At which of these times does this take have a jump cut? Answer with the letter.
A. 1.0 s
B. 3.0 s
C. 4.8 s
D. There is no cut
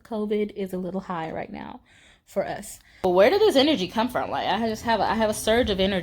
B